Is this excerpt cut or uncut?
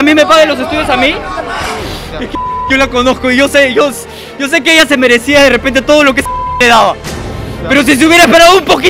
cut